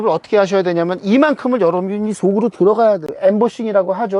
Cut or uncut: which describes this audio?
cut